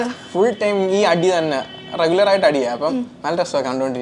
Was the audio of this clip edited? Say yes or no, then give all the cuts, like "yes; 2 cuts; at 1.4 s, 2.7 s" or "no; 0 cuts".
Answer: no; 0 cuts